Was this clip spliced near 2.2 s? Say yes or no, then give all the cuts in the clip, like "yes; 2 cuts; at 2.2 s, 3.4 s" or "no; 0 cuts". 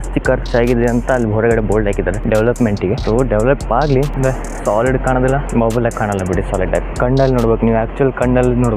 no; 0 cuts